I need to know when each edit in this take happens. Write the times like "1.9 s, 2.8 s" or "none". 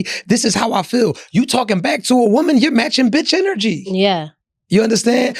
none